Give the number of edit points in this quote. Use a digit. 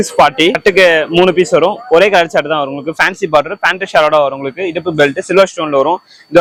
0